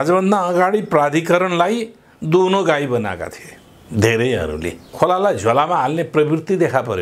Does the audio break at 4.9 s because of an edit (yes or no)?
yes